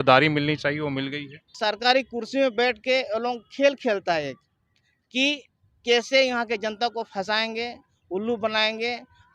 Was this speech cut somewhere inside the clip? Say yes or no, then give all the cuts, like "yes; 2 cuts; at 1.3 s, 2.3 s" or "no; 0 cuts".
yes; 1 cut; at 1.5 s